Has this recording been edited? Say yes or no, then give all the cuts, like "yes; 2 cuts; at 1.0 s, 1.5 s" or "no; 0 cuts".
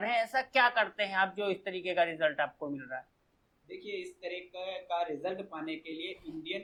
no; 0 cuts